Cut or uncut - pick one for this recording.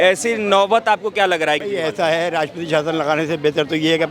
cut